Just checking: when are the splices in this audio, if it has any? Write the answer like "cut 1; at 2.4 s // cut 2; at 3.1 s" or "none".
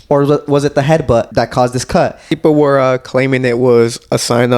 cut 1; at 1.3 s // cut 2; at 2.3 s